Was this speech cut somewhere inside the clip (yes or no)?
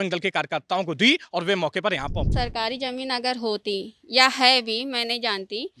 yes